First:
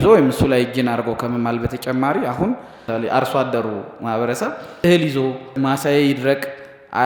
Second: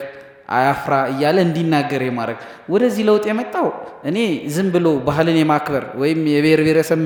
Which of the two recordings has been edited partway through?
first; 3 cuts; at 2.8 s, 4.8 s, 5.5 s

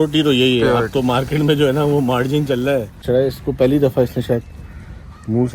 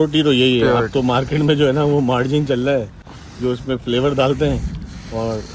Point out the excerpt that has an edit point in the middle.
first; 1 cut; at 3.0 s

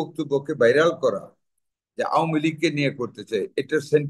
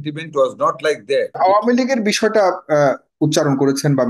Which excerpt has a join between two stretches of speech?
second; 1 cut; at 1.4 s

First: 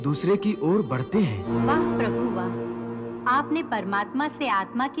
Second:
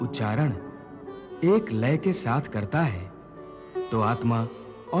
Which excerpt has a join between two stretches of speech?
first; 1 cut; at 1.5 s

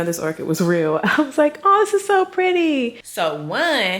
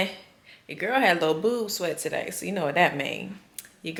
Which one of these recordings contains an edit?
first; 1 cut; at 3.0 s

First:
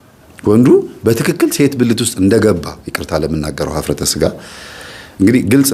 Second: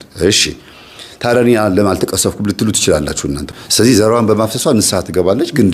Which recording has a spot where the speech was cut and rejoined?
second; 1 cut; at 3.4 s

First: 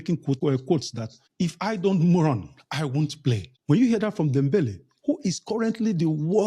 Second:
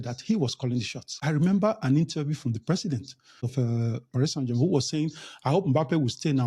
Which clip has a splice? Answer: second; 2 cuts; at 1.2 s, 3.6 s

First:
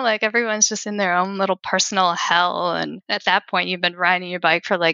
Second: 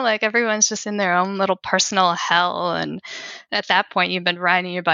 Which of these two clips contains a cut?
first; 1 cut; at 3.0 s

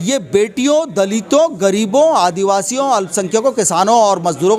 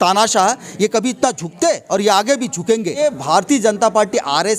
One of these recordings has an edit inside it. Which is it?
second; 1 cut; at 3.0 s

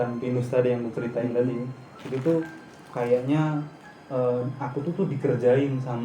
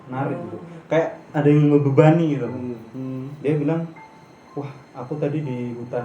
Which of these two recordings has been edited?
second; 1 cut; at 2.9 s

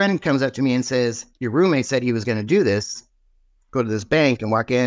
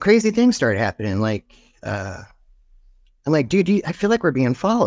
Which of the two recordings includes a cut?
first; 1 cut; at 1.3 s

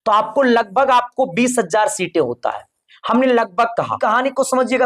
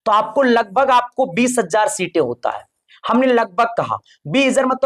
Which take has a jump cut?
first; 1 cut; at 3.9 s

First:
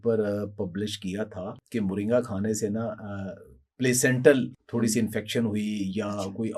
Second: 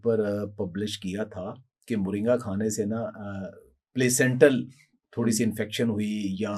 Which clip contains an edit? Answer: first; 2 cuts; at 1.6 s, 4.6 s

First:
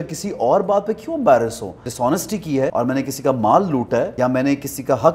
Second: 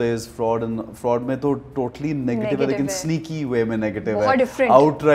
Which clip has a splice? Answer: first; 3 cuts; at 1.9 s, 2.7 s, 4.1 s

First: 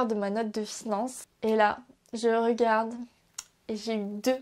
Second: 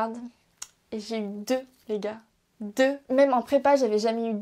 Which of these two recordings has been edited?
first; 1 cut; at 1.2 s

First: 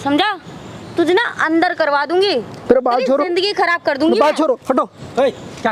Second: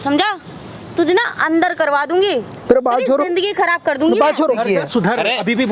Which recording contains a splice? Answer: second; 1 cut; at 4.6 s

